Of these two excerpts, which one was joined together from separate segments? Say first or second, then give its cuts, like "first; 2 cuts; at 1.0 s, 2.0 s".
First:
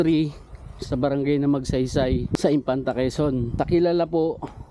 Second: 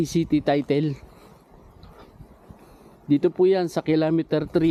first; 2 cuts; at 2.3 s, 3.5 s